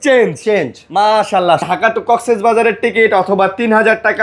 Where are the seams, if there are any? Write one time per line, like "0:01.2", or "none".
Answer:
0:01.6

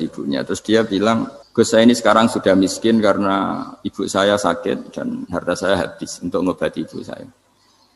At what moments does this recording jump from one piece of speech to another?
0:01.4

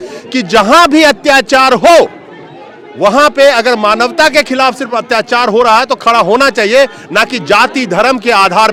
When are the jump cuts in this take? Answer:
none

